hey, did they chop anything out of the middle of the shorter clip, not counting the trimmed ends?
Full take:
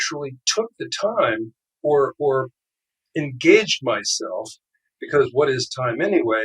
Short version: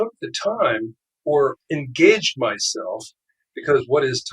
yes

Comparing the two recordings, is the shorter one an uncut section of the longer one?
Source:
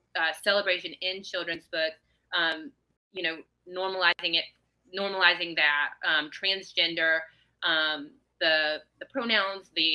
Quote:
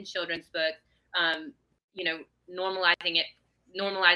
yes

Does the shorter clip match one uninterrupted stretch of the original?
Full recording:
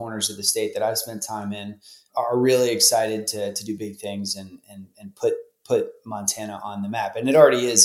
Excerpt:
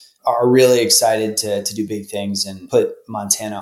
no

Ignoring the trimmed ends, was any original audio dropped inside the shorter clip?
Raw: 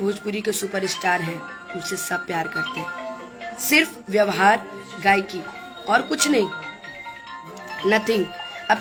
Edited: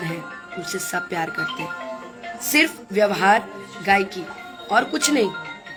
no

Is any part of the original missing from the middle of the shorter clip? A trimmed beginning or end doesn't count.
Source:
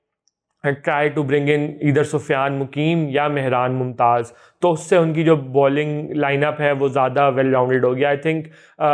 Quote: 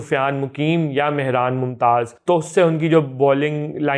yes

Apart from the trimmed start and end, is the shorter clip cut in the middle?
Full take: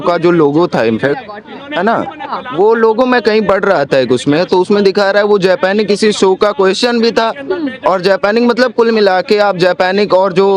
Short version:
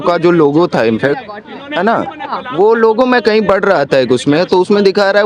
no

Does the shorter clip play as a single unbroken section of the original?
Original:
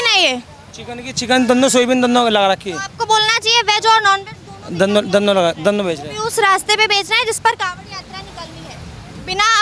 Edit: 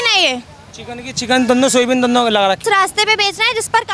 no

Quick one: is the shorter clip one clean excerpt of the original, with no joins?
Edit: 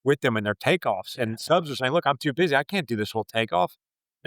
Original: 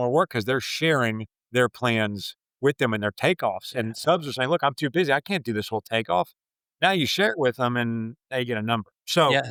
yes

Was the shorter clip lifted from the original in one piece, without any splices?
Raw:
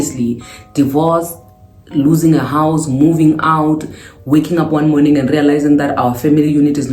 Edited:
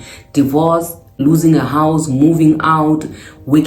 no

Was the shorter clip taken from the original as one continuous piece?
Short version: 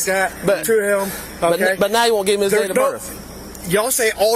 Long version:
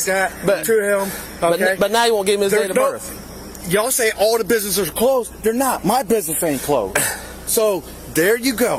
yes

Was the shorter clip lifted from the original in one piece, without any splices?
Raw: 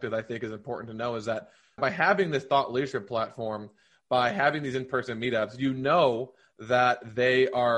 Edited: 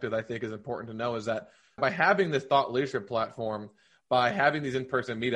yes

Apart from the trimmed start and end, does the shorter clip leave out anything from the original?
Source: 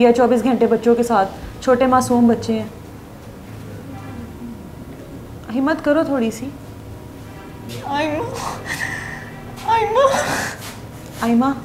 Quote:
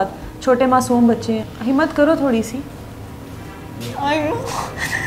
yes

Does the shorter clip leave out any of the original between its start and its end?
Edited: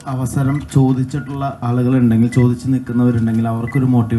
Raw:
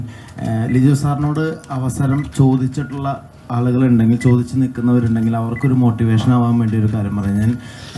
yes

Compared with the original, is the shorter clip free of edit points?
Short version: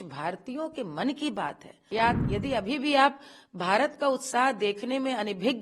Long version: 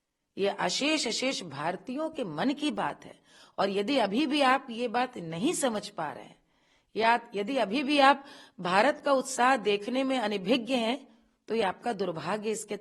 no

